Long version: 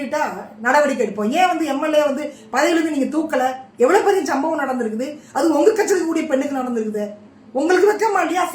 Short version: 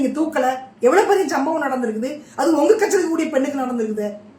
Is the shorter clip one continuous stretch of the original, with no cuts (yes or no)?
yes